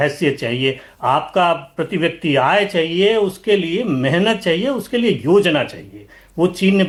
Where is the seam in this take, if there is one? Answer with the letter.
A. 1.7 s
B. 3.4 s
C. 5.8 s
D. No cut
D